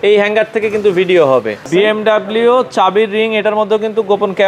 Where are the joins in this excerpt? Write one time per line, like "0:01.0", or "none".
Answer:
0:01.7